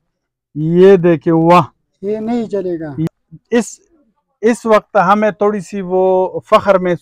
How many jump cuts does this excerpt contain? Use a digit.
1